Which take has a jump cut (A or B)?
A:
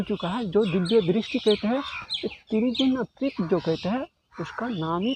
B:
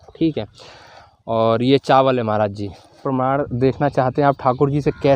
B